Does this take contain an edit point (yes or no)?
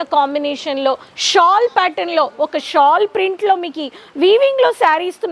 no